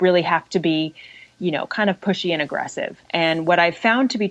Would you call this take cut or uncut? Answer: cut